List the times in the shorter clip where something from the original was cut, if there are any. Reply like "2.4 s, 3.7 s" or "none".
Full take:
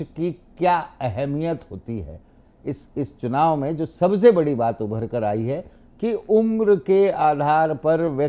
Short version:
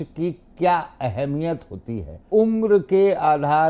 2.3 s